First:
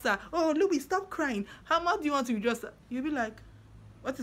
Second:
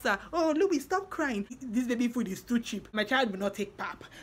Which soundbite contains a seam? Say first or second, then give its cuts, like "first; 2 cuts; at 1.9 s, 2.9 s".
second; 2 cuts; at 1.5 s, 2.9 s